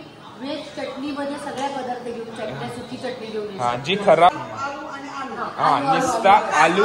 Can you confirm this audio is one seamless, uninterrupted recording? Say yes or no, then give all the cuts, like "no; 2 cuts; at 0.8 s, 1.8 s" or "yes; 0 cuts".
no; 1 cut; at 4.3 s